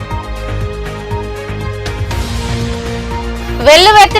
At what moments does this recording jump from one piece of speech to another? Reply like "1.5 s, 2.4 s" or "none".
2.0 s